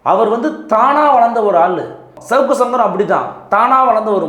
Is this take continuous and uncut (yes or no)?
no